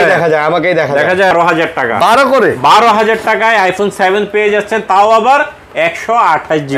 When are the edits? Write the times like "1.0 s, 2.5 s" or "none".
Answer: 1.3 s